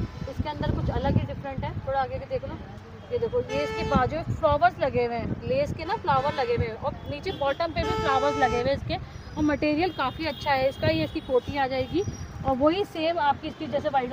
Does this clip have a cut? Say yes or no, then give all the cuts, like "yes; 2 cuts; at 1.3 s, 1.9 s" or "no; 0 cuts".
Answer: no; 0 cuts